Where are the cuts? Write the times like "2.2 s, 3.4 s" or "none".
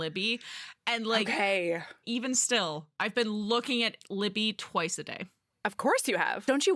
2.0 s